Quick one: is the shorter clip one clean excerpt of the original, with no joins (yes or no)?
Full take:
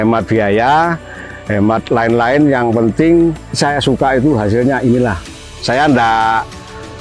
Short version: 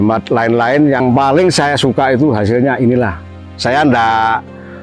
no